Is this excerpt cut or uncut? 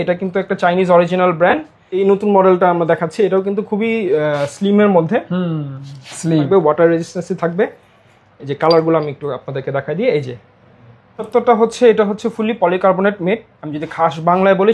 cut